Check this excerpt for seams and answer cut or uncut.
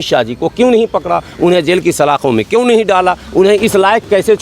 uncut